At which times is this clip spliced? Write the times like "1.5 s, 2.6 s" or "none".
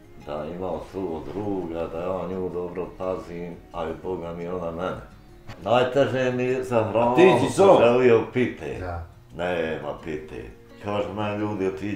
5.5 s